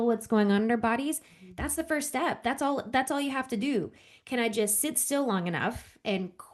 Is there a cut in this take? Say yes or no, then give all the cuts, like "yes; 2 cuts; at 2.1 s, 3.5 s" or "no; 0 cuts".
no; 0 cuts